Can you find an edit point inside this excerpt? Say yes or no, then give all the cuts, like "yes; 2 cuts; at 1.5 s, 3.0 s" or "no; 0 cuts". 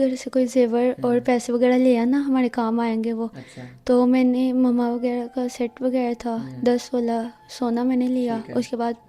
no; 0 cuts